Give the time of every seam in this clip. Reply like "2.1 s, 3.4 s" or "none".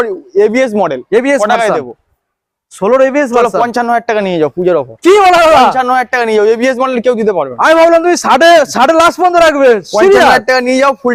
none